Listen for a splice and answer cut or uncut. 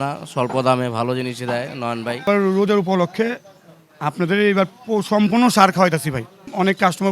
cut